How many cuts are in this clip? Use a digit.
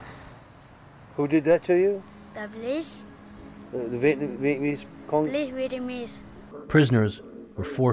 1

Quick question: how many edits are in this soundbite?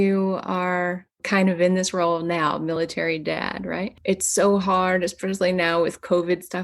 2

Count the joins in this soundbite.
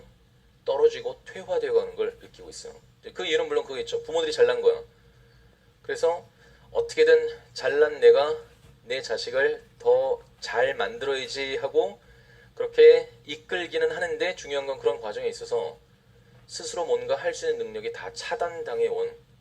1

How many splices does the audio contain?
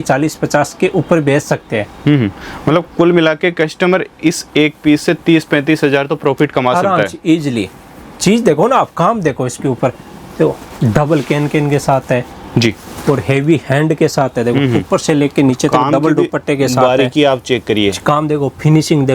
0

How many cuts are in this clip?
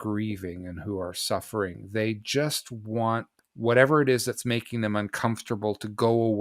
1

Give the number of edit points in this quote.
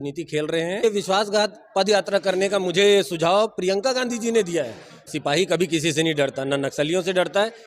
2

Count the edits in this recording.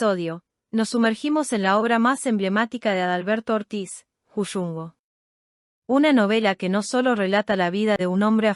0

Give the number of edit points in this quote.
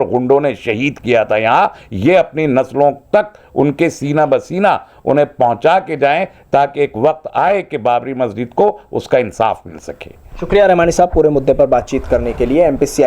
0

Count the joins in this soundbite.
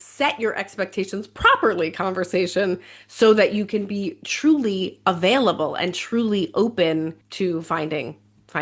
1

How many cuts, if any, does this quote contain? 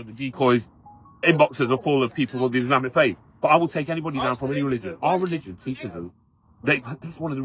1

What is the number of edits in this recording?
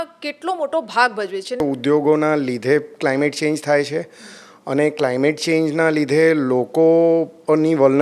1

